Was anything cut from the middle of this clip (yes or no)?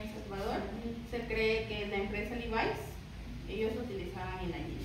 no